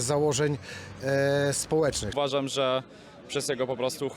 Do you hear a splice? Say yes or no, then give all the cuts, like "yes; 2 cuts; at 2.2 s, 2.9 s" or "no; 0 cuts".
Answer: yes; 1 cut; at 2.1 s